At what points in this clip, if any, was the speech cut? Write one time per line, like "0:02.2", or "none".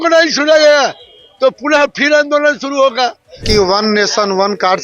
0:03.4